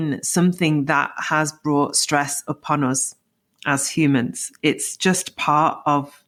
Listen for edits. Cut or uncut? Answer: uncut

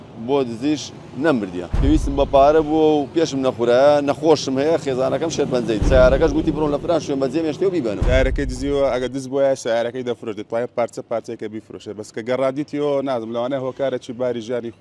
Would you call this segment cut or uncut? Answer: cut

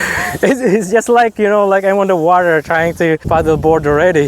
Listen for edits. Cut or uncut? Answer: cut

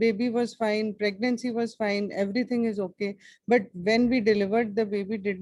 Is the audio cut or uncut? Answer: uncut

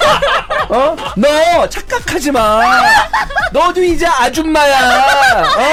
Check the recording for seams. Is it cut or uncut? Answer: uncut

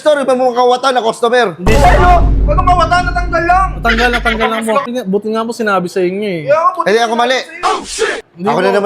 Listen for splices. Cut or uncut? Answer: cut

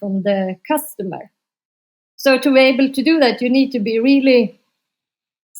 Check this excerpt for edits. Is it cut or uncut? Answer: uncut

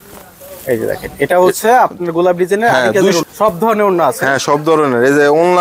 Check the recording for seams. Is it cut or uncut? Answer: cut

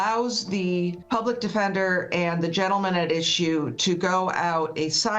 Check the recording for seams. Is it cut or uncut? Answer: cut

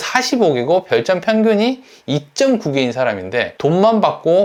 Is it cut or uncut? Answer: uncut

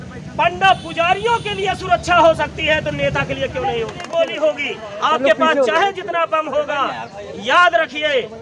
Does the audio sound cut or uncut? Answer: cut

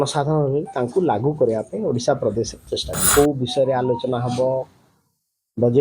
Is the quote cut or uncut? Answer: cut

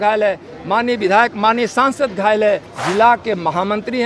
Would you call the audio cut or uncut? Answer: cut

